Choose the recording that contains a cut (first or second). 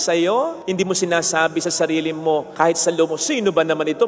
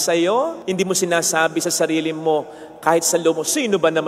first